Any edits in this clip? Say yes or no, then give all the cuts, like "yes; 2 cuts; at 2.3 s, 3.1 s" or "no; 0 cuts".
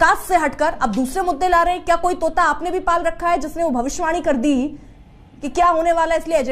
no; 0 cuts